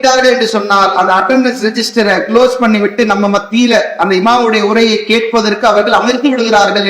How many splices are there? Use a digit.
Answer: 0